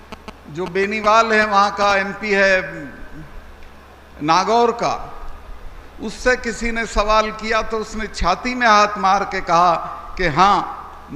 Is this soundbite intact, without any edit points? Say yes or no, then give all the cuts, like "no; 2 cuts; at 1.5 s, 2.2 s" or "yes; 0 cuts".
yes; 0 cuts